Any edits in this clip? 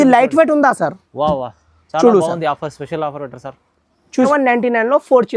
yes; 1 cut; at 4.3 s

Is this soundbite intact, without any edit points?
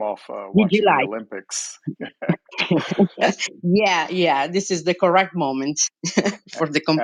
yes; 0 cuts

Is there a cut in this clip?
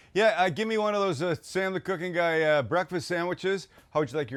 no; 0 cuts

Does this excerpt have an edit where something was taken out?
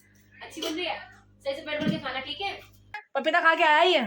yes; 1 cut; at 2.9 s

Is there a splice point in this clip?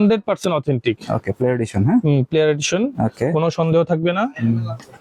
no; 0 cuts

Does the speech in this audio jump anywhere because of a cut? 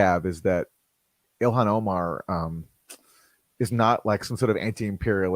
no; 0 cuts

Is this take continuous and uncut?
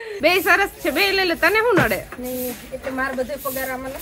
yes; 0 cuts

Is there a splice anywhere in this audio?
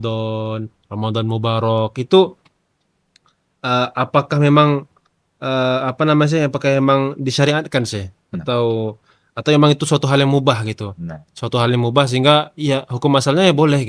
no; 0 cuts

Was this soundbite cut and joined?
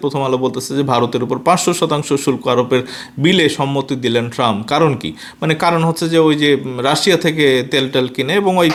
no; 0 cuts

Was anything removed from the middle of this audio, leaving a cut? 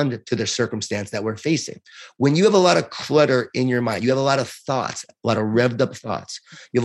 no; 0 cuts

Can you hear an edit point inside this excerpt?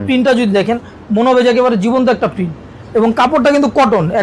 no; 0 cuts

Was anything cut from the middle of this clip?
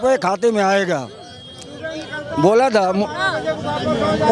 no; 0 cuts

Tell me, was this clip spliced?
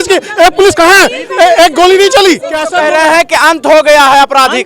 no; 0 cuts

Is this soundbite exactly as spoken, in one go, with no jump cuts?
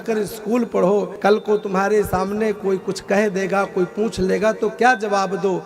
yes; 0 cuts

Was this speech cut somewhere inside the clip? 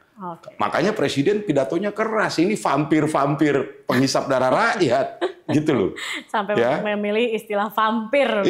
no; 0 cuts

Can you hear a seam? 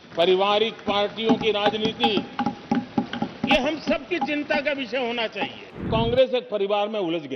yes; 1 cut; at 5.8 s

